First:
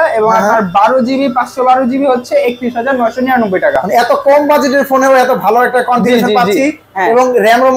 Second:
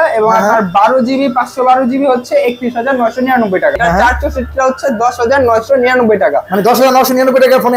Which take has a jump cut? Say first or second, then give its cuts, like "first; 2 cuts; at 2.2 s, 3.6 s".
second; 1 cut; at 3.8 s